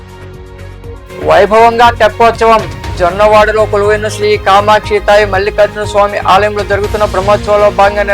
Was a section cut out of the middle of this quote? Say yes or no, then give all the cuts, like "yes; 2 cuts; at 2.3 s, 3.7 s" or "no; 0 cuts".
yes; 1 cut; at 1.0 s